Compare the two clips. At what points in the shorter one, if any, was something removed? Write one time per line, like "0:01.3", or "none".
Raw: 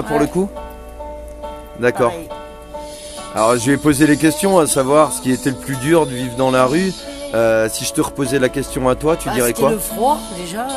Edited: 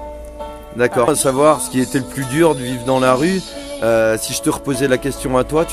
0:01.1